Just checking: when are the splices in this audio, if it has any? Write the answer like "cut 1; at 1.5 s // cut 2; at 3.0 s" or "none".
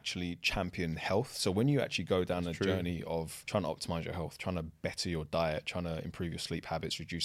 cut 1; at 3.4 s